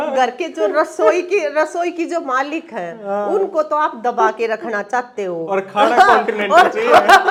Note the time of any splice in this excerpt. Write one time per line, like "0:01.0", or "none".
none